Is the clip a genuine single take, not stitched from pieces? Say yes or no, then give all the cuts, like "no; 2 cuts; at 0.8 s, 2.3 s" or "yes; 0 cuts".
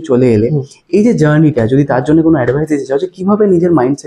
yes; 0 cuts